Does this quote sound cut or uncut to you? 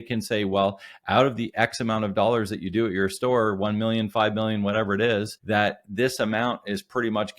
cut